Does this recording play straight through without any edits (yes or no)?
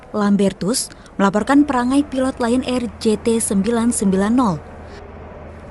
no